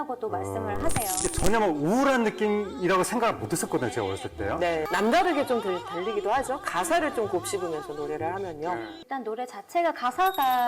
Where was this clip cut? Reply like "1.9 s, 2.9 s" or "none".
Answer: 1.2 s, 4.9 s, 9.0 s